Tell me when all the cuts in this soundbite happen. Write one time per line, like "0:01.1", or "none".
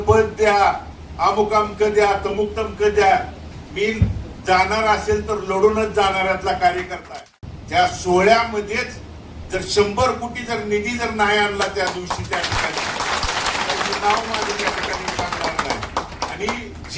0:07.1

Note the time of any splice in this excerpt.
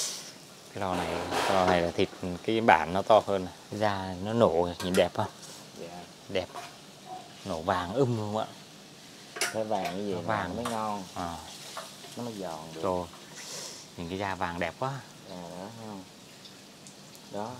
0:03.6

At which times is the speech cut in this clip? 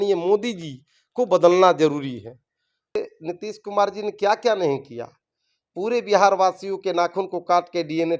0:03.0

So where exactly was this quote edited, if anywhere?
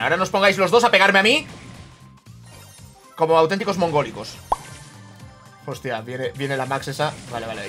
0:04.6

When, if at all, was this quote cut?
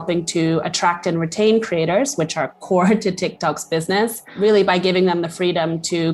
0:04.2

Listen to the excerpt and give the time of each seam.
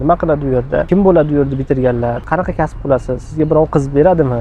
0:00.9
0:02.2

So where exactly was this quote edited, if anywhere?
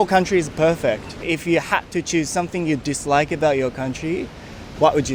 none

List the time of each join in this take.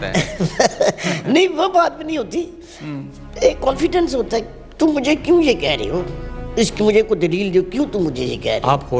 none

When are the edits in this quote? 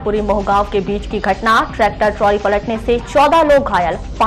none

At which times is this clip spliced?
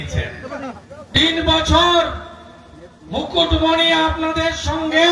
0:01.1

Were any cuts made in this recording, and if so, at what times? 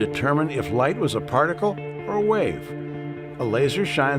0:00.9

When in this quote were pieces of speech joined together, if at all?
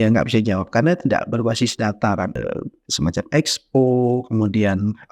0:02.4

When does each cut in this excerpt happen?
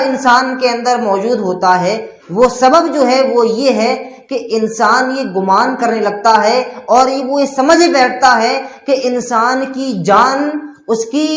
none

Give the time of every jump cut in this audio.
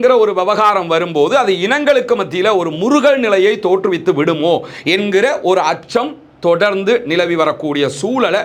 none

